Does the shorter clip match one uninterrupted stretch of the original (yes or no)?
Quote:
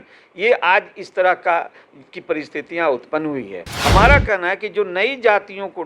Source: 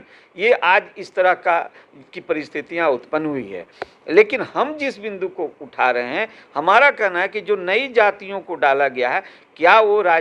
no